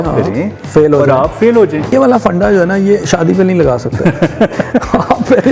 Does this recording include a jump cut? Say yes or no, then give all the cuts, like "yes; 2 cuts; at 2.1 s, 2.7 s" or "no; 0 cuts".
yes; 1 cut; at 1.9 s